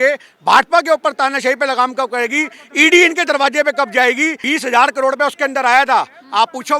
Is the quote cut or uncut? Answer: cut